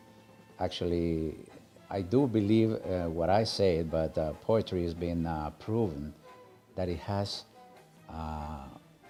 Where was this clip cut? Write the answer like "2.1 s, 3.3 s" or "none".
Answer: none